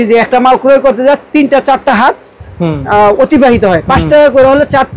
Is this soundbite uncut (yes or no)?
yes